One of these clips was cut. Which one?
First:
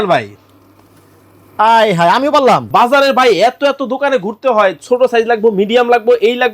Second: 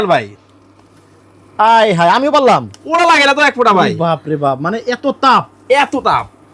first; 1 cut; at 2.7 s

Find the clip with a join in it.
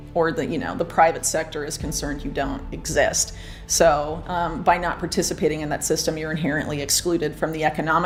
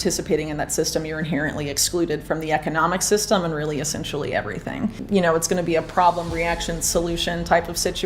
second; 1 cut; at 5.0 s

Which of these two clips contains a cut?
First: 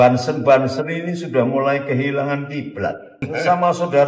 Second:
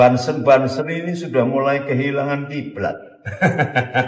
first; 1 cut; at 3.2 s

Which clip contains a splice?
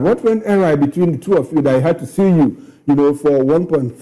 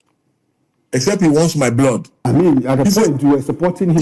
second; 1 cut; at 2.1 s

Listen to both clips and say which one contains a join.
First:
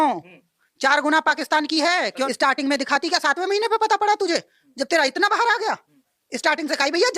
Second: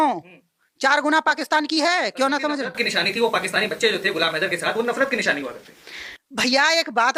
first; 1 cut; at 2.3 s

